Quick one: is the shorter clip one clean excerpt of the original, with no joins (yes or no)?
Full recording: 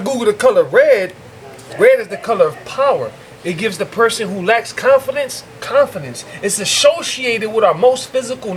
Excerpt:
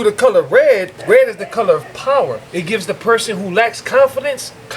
no